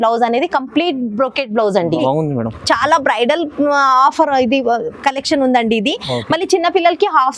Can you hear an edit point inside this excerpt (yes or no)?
yes